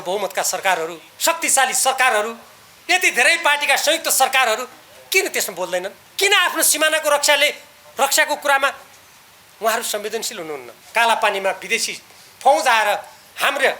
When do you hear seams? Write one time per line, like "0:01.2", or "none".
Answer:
0:01.1
0:06.0
0:10.7